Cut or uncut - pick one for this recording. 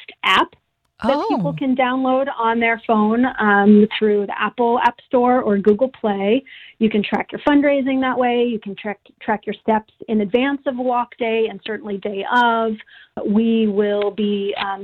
cut